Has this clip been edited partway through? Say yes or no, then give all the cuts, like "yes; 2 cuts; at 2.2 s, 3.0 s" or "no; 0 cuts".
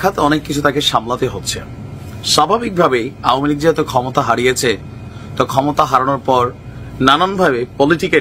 no; 0 cuts